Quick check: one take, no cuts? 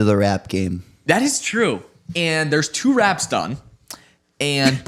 yes; 0 cuts

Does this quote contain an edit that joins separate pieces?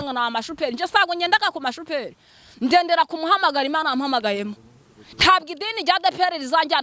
no; 0 cuts

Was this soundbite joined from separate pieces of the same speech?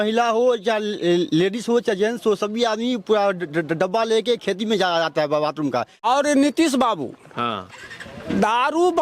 yes; 1 cut; at 6.0 s

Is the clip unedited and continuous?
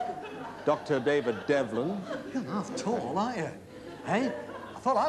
yes; 0 cuts

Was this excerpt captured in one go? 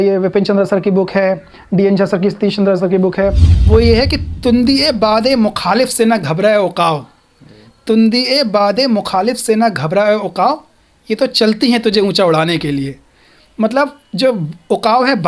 no; 1 cut; at 3.5 s

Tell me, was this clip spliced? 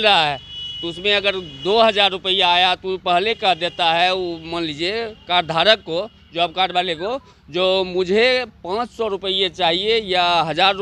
no; 0 cuts

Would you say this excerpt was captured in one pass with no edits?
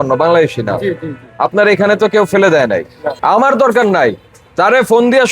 no; 1 cut; at 3.0 s

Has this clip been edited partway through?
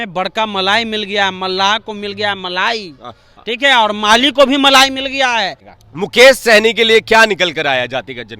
yes; 1 cut; at 5.6 s

